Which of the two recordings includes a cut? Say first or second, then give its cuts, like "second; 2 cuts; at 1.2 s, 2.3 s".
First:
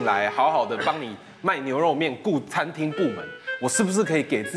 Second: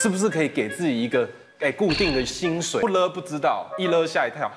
second; 1 cut; at 2.8 s